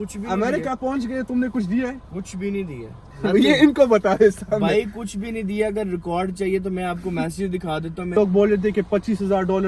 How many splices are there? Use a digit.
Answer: 1